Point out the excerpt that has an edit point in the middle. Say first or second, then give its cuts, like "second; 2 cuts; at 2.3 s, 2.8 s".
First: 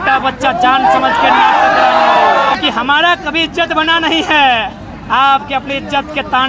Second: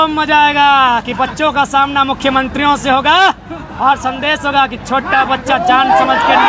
first; 1 cut; at 2.5 s